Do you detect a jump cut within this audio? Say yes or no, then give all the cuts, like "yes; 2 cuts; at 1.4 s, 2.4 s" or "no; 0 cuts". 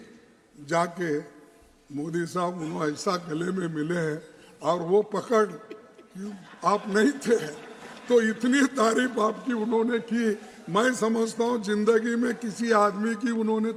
no; 0 cuts